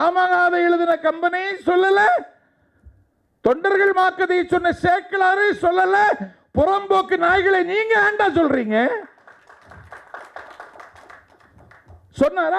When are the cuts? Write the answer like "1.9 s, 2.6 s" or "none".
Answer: none